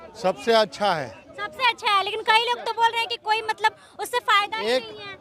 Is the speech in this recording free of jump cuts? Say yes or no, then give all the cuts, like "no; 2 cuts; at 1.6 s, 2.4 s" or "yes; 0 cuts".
yes; 0 cuts